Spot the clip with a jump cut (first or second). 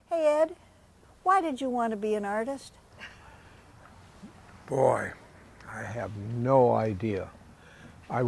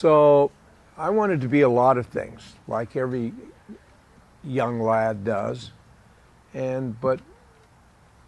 second